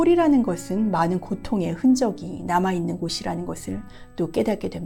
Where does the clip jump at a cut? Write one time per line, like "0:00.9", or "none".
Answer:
none